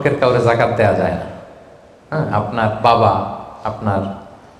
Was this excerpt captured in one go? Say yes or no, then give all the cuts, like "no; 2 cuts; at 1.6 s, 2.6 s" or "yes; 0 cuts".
yes; 0 cuts